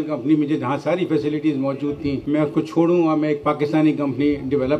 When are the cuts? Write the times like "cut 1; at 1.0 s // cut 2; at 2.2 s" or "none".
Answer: cut 1; at 2.2 s